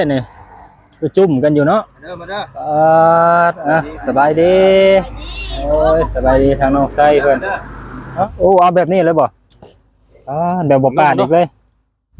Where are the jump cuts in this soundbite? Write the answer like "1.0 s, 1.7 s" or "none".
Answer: 8.1 s